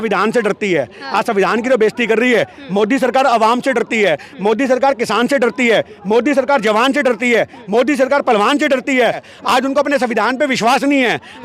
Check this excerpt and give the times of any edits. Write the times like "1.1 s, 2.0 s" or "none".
9.3 s